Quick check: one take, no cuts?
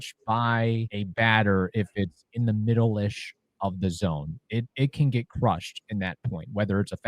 no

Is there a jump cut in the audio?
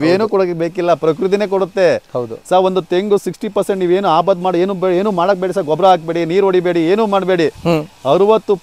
no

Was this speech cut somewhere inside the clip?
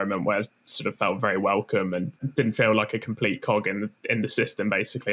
yes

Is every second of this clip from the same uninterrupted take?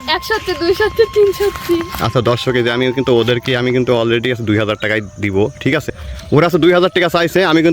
no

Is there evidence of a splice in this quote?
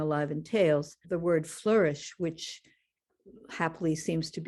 yes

